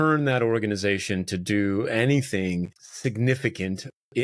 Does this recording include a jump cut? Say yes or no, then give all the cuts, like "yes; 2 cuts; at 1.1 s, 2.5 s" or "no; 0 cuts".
no; 0 cuts